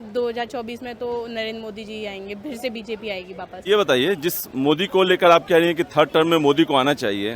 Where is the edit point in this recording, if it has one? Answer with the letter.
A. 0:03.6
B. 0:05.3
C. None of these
A